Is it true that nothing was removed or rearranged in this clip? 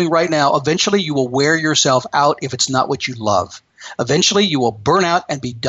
yes; 0 cuts

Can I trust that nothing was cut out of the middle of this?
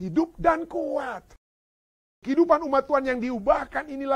no; 1 cut; at 2.0 s

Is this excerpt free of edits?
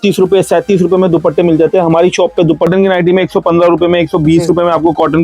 no; 1 cut; at 2.7 s

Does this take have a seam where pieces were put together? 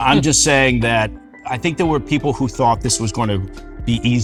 no; 0 cuts

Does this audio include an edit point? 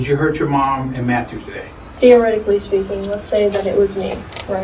yes; 1 cut; at 1.8 s

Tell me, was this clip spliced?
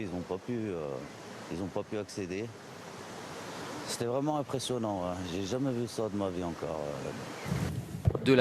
yes; 1 cut; at 4.2 s

